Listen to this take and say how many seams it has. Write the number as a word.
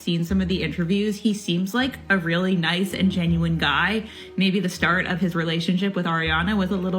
zero